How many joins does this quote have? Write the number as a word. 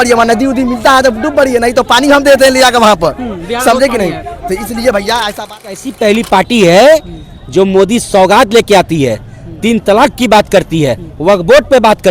one